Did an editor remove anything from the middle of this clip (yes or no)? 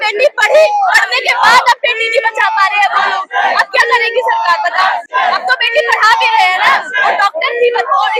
no